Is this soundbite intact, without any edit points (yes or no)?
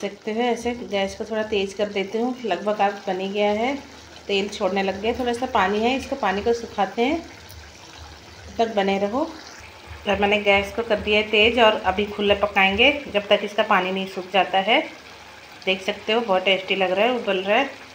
yes